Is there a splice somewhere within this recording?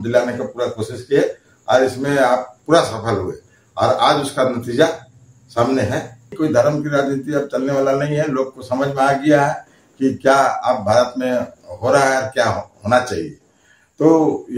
yes; 1 cut; at 6.3 s

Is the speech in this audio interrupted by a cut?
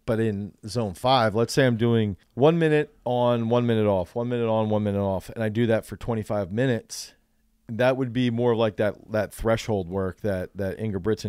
yes; 1 cut; at 2.2 s

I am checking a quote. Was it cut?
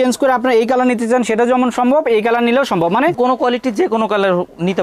no; 0 cuts

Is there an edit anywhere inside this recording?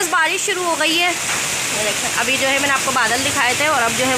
no; 0 cuts

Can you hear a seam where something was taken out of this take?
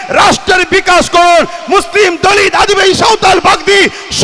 no; 0 cuts

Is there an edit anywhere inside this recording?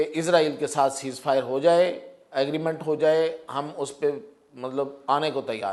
no; 0 cuts

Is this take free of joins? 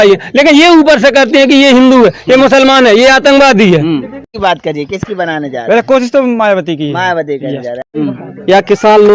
no; 2 cuts; at 4.3 s, 7.9 s

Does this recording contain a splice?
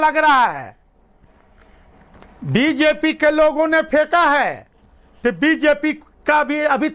no; 0 cuts

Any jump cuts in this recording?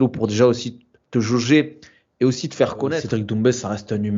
yes; 1 cut; at 3.0 s

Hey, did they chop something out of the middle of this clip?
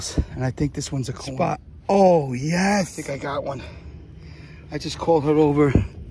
yes; 2 cuts; at 1.3 s, 3.3 s

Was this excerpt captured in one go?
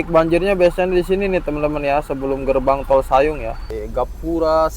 no; 1 cut; at 3.7 s

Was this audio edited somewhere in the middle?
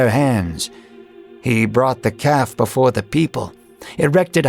no; 0 cuts

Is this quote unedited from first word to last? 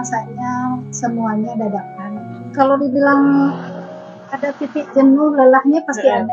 no; 1 cut; at 2.4 s

